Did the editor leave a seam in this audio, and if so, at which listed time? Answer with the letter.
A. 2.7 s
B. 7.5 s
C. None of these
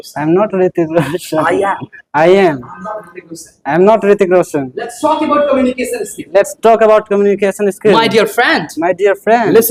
C